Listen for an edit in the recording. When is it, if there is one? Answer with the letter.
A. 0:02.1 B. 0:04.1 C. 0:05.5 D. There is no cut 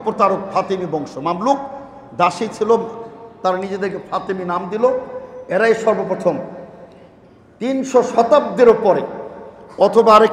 D